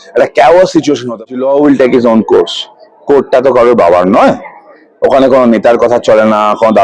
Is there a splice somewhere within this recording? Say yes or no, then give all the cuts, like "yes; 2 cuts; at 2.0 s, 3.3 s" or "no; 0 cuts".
yes; 1 cut; at 1.2 s